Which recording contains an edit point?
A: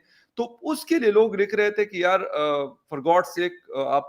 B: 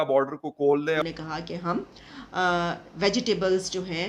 B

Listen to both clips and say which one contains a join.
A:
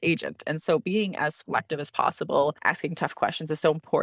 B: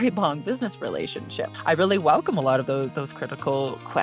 A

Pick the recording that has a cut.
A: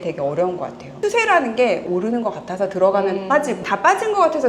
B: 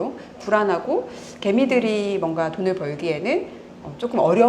A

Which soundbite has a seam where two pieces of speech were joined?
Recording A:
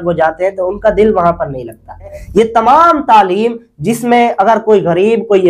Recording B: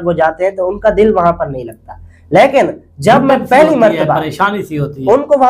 A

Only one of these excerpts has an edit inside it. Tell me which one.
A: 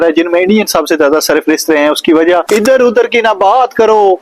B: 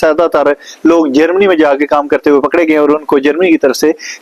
A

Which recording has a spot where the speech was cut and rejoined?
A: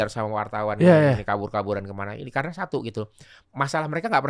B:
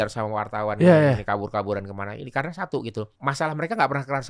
B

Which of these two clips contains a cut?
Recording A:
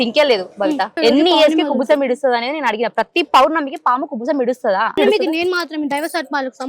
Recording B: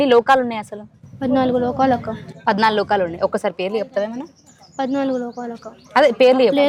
A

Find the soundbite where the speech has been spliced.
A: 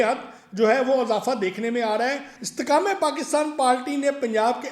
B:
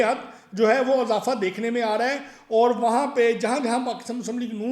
A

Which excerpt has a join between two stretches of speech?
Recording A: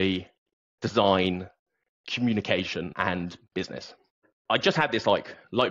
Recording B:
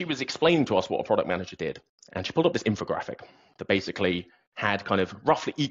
A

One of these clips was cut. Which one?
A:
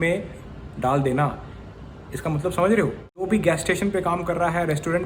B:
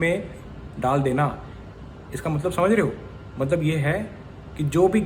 A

